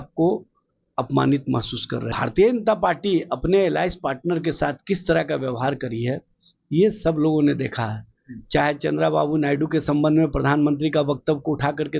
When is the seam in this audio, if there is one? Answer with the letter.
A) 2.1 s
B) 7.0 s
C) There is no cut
A